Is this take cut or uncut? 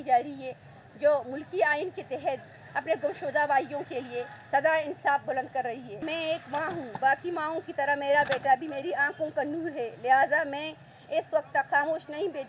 cut